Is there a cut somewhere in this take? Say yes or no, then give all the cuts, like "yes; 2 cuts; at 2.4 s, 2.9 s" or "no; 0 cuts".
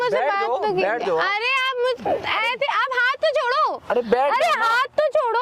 no; 0 cuts